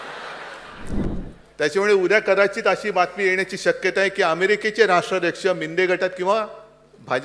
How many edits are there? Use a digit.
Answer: 1